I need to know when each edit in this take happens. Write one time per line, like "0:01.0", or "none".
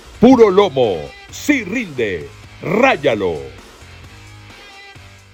none